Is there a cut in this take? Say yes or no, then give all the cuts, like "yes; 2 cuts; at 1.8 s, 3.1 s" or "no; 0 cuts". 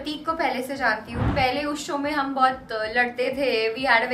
yes; 1 cut; at 1.3 s